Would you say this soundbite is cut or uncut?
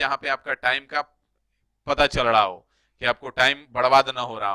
uncut